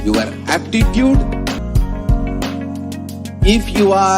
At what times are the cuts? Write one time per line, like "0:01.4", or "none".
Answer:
0:01.6